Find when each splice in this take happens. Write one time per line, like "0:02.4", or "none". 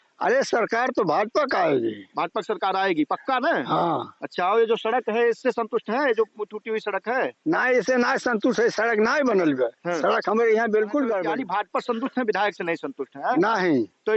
0:11.3

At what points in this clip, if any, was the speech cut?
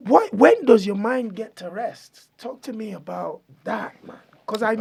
none

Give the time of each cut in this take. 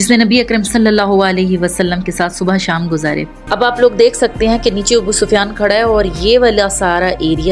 0:03.4

